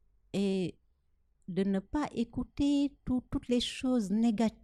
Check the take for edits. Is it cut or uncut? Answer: uncut